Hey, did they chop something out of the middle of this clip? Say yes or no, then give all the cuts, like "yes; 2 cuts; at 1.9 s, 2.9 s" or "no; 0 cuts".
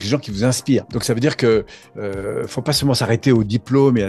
no; 0 cuts